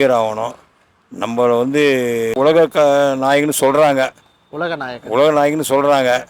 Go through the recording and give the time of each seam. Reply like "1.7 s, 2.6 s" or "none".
2.4 s